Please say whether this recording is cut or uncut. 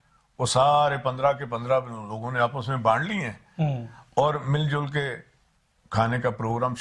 uncut